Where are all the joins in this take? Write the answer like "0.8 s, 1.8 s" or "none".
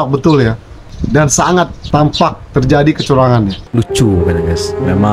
0.9 s, 1.8 s, 3.6 s